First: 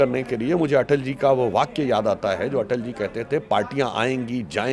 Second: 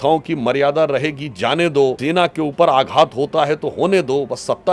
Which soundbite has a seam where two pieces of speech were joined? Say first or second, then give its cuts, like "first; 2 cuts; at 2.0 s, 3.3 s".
second; 1 cut; at 2.0 s